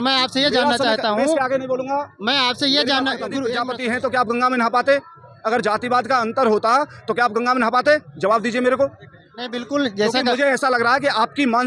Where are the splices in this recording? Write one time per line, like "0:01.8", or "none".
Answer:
0:03.5